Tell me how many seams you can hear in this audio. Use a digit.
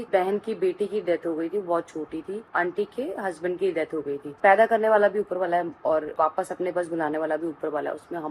2